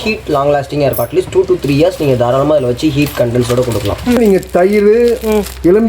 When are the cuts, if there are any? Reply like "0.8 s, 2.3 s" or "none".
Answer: 4.2 s